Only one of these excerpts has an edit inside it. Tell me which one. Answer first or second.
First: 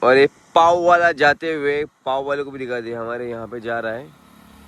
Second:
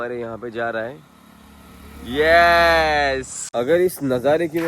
second